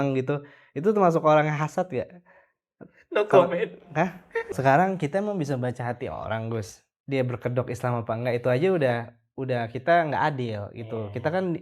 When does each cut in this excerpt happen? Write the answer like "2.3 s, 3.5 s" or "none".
4.4 s